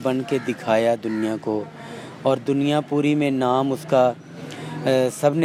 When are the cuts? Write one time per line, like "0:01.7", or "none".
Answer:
none